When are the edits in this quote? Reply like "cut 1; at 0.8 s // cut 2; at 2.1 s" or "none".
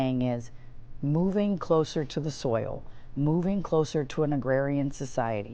none